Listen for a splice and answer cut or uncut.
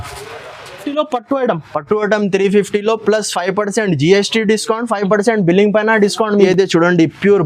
cut